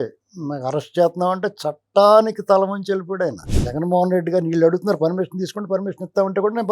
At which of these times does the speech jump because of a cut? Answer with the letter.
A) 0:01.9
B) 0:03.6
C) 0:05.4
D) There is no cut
B